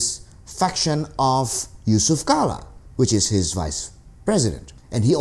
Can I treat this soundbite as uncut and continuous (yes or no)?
yes